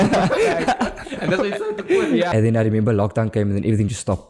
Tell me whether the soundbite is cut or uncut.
cut